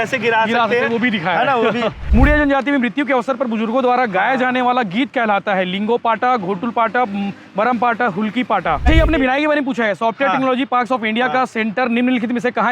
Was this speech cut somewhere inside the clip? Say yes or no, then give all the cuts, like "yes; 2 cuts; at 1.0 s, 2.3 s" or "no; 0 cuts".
yes; 2 cuts; at 2.0 s, 8.9 s